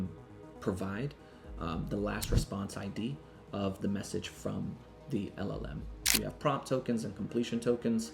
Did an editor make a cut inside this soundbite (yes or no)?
yes